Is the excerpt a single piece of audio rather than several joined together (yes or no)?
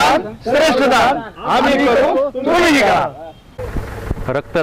yes